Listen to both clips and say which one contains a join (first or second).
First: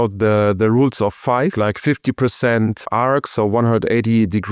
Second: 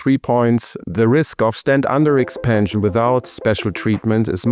first